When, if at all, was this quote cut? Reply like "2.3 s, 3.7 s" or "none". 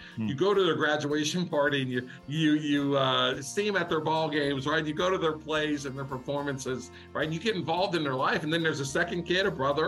none

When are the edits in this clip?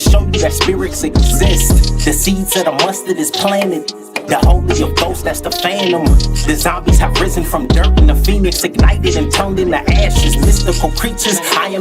3.5 s

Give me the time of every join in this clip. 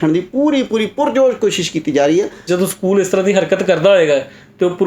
2.4 s

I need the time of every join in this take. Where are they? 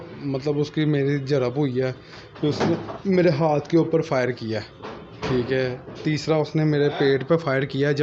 none

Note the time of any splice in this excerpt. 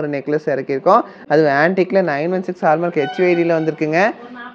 none

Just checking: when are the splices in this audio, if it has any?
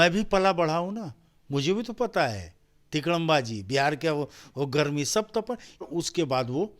5.9 s

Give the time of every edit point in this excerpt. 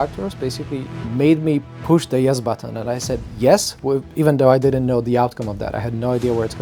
1.0 s, 1.7 s

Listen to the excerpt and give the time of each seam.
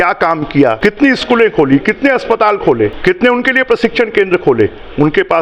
0.8 s, 3.0 s

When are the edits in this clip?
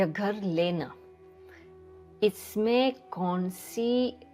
none

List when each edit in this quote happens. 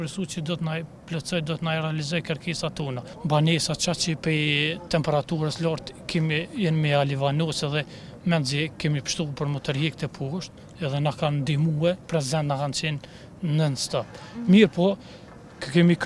3.1 s

